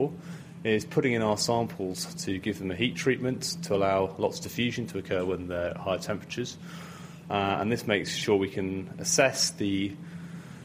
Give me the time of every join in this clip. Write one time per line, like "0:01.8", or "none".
none

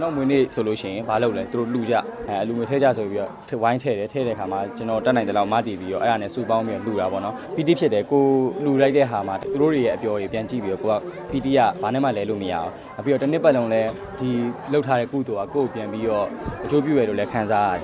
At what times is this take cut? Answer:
0:02.2
0:07.4
0:09.4

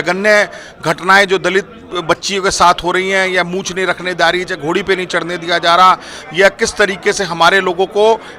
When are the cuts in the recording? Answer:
none

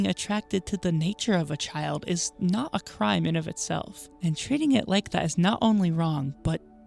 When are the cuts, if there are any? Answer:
none

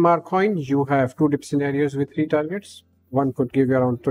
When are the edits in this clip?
none

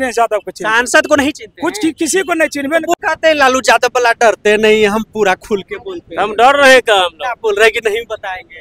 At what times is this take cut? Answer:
0:02.9

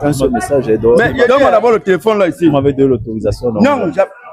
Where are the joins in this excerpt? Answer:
0:01.3

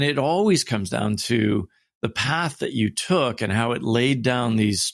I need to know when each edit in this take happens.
none

